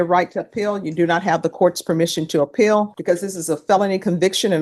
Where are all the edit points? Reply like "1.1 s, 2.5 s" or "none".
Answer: 2.9 s